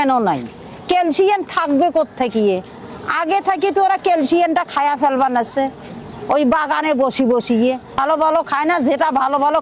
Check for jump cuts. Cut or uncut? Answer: cut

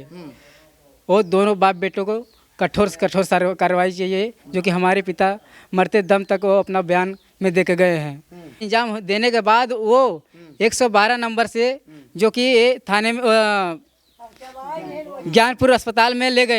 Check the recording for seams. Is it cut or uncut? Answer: cut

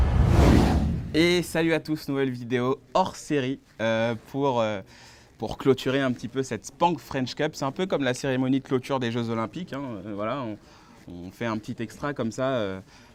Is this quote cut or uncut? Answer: uncut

